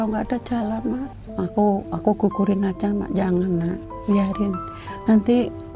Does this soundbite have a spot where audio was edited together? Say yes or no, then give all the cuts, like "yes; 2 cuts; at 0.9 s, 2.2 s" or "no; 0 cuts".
yes; 1 cut; at 1.2 s